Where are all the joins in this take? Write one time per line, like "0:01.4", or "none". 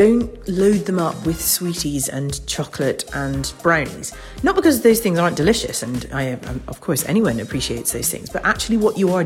none